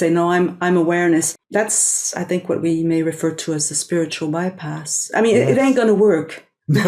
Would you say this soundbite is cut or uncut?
cut